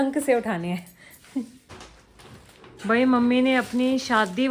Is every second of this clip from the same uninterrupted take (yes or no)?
yes